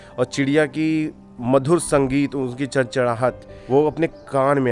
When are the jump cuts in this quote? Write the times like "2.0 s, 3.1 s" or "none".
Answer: 3.5 s